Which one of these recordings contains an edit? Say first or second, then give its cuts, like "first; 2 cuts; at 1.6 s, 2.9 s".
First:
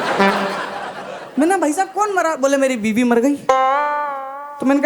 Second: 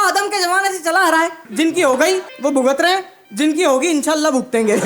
second; 3 cuts; at 1.4 s, 2.3 s, 3.2 s